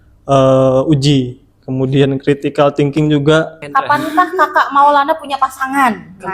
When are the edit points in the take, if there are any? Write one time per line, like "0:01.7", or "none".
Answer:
0:03.6